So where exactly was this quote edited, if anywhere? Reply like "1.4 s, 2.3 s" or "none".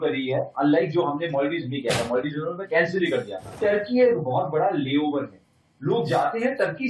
3.5 s

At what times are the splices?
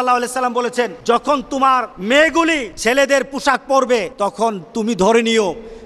1.0 s, 1.9 s, 2.7 s, 4.1 s

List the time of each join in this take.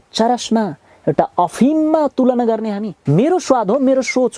2.9 s

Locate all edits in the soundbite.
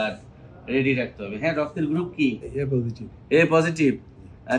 2.5 s

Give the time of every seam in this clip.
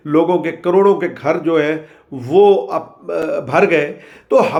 none

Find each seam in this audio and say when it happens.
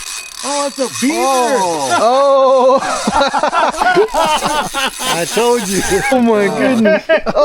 6.1 s

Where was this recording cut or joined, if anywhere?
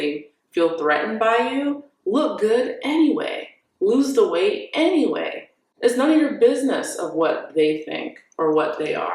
5.6 s

